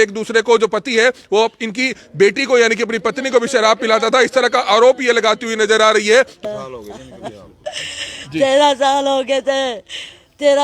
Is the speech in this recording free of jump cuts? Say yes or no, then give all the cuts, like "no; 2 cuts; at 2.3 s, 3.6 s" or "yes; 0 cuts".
no; 1 cut; at 6.4 s